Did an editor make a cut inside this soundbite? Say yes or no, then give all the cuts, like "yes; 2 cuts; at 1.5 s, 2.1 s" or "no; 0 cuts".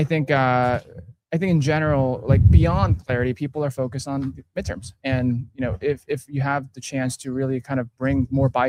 no; 0 cuts